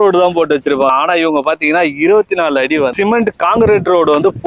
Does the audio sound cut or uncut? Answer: cut